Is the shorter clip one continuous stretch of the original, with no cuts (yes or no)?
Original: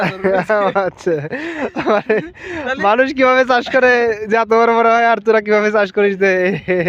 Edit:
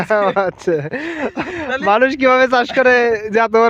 no